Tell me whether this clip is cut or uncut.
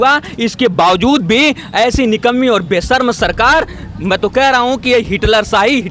uncut